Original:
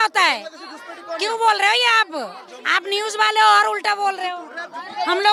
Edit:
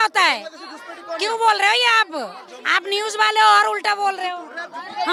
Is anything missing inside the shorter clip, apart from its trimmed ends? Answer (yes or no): no